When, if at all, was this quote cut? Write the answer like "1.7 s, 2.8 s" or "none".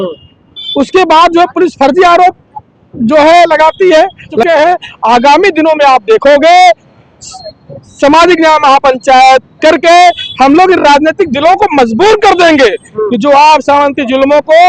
4.4 s